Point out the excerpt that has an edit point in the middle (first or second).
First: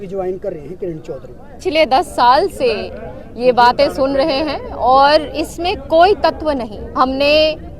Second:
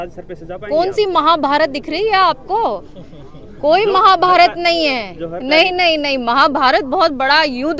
first